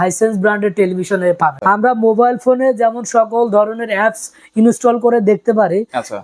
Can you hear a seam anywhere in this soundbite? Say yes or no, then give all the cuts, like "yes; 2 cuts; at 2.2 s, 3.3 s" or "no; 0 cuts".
yes; 1 cut; at 1.6 s